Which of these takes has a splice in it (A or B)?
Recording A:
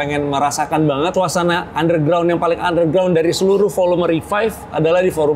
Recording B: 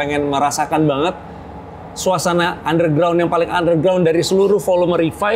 A